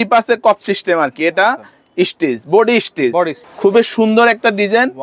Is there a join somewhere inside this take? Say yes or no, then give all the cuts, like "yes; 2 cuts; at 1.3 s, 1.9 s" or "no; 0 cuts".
yes; 1 cut; at 3.4 s